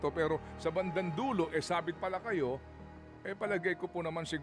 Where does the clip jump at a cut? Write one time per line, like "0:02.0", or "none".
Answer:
none